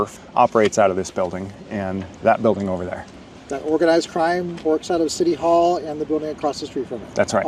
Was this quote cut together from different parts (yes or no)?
no